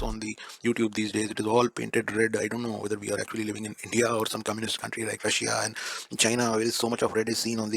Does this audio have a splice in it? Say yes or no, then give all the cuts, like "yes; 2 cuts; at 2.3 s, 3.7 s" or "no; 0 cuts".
no; 0 cuts